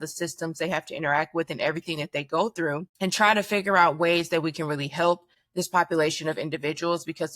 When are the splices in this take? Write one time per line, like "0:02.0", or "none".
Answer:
0:02.9
0:05.4

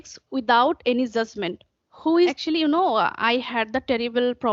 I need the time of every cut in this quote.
0:02.3

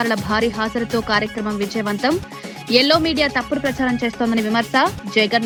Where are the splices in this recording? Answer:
none

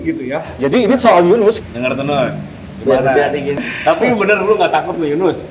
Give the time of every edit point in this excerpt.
0:01.6
0:03.6

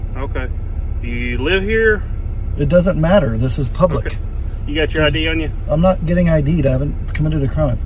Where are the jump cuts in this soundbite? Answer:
none

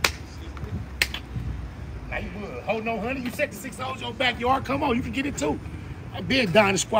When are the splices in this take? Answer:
none

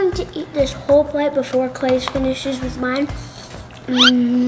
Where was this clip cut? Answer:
0:03.2

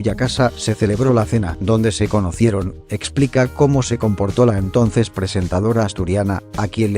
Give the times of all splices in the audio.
0:03.4

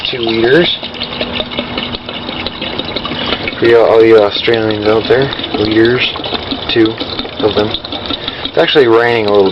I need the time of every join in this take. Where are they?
none

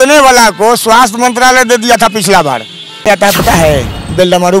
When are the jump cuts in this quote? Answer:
0:03.1

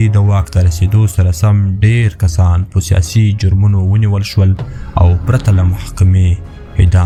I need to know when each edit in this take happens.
none

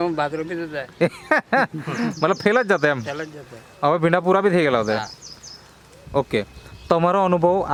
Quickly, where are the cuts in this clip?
none

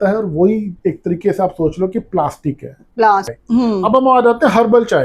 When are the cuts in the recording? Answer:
0:03.3

